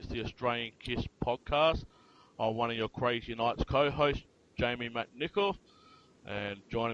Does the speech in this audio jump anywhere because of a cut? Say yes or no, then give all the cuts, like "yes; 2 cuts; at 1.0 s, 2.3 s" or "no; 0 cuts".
no; 0 cuts